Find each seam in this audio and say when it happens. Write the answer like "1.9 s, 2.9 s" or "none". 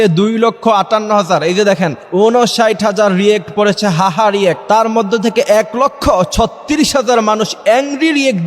2.0 s, 4.6 s